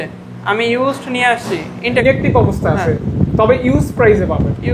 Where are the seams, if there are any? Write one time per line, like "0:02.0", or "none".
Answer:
0:02.0